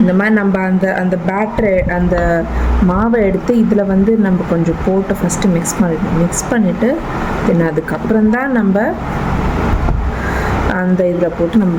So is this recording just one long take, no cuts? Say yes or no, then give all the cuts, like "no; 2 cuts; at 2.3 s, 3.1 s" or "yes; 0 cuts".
yes; 0 cuts